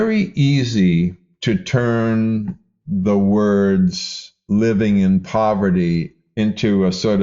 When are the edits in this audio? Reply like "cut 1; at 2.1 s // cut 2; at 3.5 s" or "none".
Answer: cut 1; at 1.3 s // cut 2; at 6.1 s